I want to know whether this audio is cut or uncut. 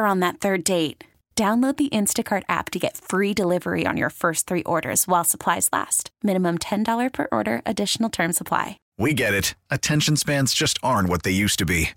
cut